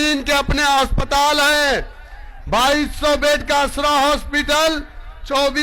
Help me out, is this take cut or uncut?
uncut